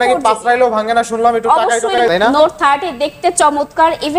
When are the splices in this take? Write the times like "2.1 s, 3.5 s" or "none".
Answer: 2.0 s